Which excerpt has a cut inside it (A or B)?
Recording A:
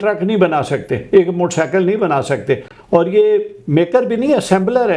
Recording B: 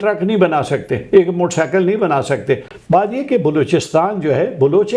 B